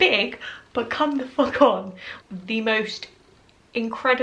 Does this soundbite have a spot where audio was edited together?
yes; 1 cut; at 2.1 s

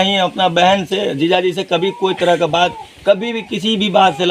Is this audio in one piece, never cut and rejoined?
yes; 0 cuts

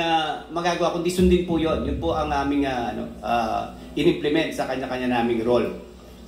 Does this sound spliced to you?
no; 0 cuts

